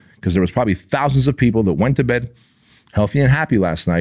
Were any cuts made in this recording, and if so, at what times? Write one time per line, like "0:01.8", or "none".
none